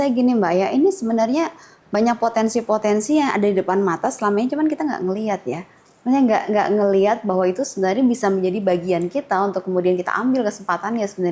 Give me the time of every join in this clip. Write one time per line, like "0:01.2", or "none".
none